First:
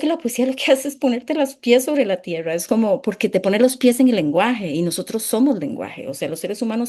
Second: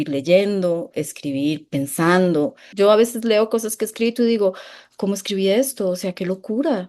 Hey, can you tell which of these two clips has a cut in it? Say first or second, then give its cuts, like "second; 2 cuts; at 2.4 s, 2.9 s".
second; 1 cut; at 2.7 s